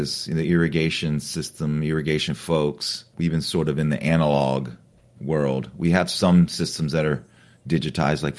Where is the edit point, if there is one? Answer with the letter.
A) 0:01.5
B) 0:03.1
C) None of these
B